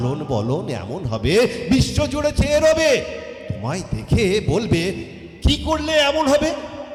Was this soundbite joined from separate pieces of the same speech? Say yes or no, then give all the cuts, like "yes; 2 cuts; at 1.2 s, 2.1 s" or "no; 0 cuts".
no; 0 cuts